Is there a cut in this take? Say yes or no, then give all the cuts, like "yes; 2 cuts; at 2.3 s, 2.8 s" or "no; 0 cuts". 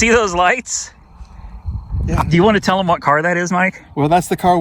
no; 0 cuts